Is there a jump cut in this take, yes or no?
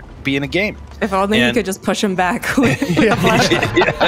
no